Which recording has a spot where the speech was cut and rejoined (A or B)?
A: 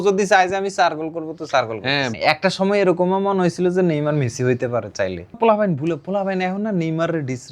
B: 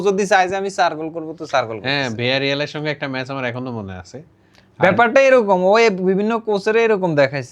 A